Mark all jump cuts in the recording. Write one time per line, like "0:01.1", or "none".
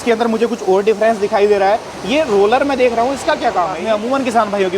0:03.8